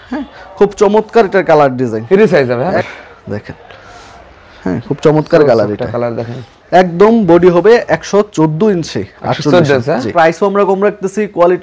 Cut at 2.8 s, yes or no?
yes